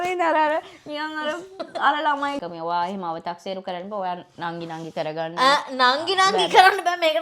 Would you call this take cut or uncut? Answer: cut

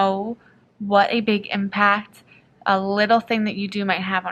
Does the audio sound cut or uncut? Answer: uncut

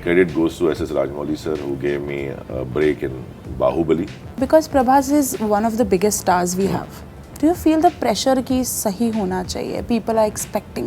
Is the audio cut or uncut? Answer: cut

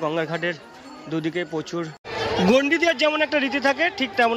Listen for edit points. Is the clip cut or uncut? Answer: cut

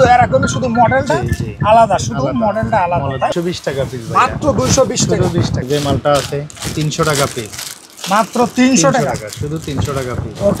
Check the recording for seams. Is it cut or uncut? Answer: cut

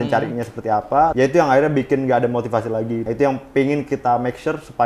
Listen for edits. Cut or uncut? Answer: cut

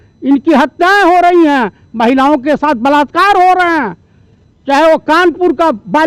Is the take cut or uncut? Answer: uncut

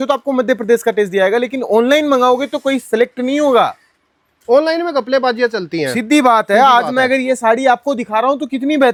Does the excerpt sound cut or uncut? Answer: uncut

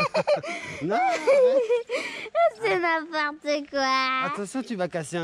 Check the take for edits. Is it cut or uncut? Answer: uncut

